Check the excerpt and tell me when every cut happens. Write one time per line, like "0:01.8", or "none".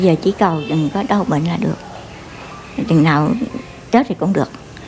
none